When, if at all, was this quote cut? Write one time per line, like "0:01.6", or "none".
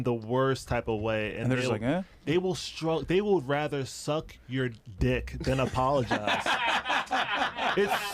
none